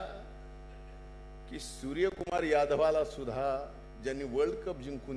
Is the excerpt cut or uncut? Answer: uncut